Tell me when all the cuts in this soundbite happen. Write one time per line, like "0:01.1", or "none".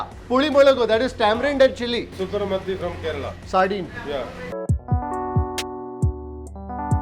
0:02.1
0:04.5